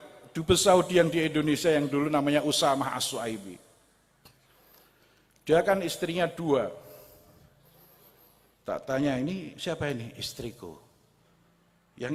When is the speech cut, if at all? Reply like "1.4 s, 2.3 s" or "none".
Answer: none

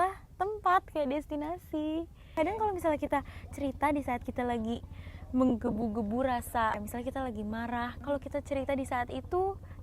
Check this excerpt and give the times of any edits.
2.2 s, 6.8 s, 8.0 s

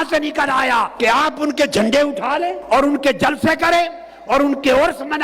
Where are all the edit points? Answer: 0.9 s, 2.6 s

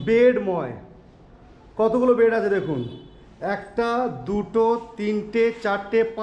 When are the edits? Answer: none

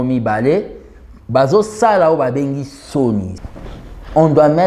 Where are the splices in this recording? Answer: 3.4 s

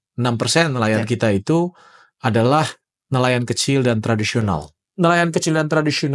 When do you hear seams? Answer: 4.7 s

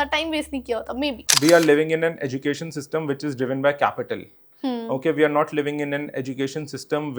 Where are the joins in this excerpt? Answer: 1.3 s

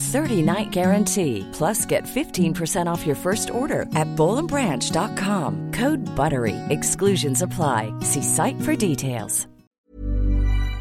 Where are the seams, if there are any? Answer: 9.7 s

